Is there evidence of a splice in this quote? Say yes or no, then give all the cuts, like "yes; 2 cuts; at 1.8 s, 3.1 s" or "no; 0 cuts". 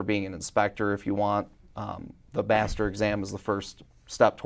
no; 0 cuts